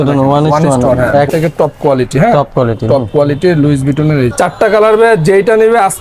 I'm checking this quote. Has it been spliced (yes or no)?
yes